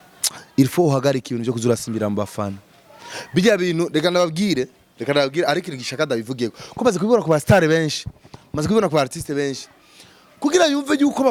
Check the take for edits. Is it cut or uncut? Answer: uncut